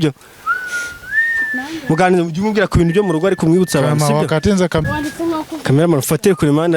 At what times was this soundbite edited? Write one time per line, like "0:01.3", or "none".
0:04.8